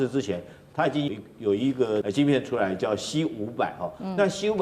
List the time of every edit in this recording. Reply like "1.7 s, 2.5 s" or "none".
1.1 s, 2.0 s